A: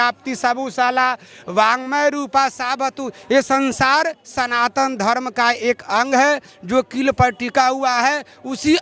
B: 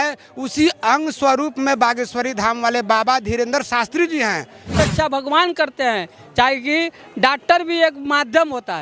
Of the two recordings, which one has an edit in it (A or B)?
B